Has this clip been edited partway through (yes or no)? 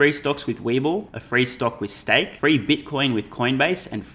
yes